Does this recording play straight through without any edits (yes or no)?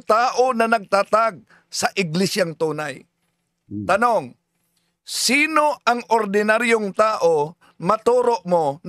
no